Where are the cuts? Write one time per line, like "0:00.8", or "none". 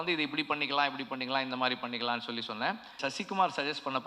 0:03.0